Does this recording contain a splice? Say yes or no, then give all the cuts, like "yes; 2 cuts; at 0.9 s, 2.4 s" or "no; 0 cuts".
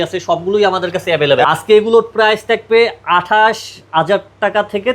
yes; 1 cut; at 1.4 s